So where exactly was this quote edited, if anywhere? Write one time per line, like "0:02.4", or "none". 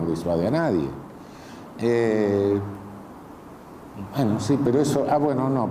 none